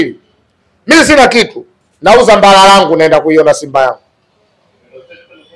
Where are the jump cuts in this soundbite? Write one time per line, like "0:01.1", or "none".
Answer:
none